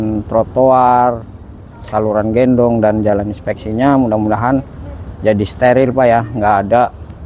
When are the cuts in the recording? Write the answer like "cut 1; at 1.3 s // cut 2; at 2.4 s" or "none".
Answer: none

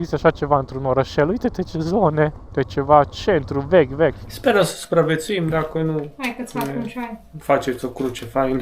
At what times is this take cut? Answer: cut 1; at 2.4 s // cut 2; at 4.3 s

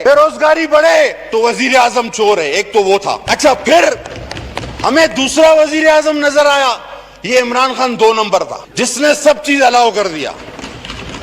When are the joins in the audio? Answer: cut 1; at 3.2 s

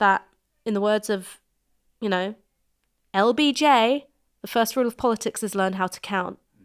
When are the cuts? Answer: none

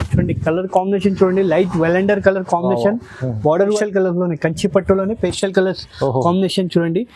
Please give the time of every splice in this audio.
cut 1; at 3.8 s

